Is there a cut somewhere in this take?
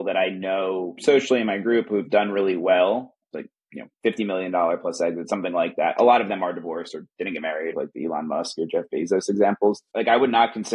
yes; 3 cuts; at 3.2 s, 7.7 s, 9.9 s

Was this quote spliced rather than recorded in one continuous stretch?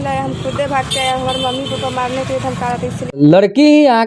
yes; 1 cut; at 3.2 s

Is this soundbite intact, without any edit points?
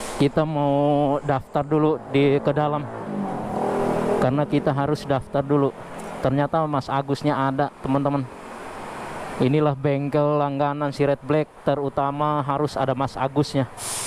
yes; 0 cuts

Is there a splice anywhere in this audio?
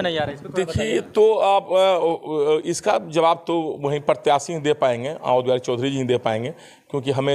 no; 0 cuts

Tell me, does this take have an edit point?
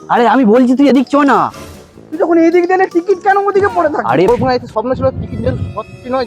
yes; 1 cut; at 4.3 s

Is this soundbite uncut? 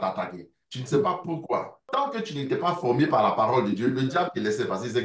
no; 1 cut; at 1.8 s

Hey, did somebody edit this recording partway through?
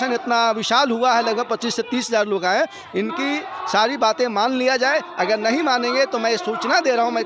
no; 0 cuts

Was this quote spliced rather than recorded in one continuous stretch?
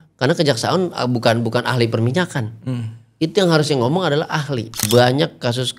yes; 1 cut; at 4.7 s

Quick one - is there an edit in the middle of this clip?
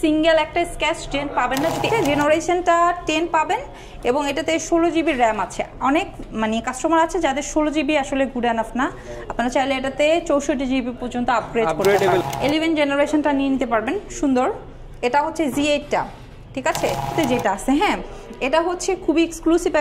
yes; 3 cuts; at 1.9 s, 12.3 s, 17.1 s

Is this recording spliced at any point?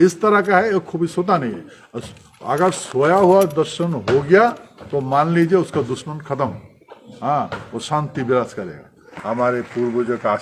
yes; 1 cut; at 9.0 s

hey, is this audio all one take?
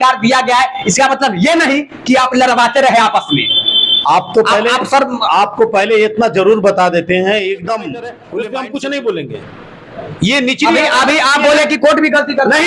no; 1 cut; at 8.2 s

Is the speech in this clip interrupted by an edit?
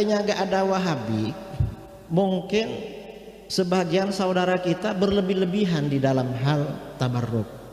no; 0 cuts

